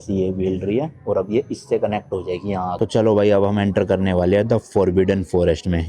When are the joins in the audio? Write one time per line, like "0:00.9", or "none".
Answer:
0:02.8